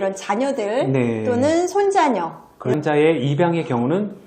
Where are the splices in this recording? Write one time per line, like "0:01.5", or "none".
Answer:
0:02.8